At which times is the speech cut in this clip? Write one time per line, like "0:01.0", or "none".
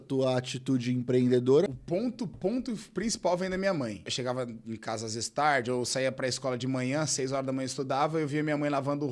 0:01.8
0:04.1